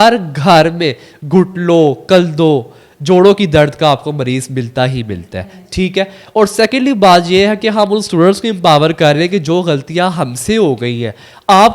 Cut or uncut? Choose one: uncut